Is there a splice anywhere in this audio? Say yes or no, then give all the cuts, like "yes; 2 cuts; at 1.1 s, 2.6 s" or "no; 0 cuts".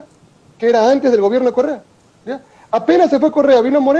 no; 0 cuts